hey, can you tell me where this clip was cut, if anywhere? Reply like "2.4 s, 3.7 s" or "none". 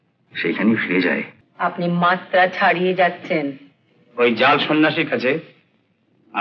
1.4 s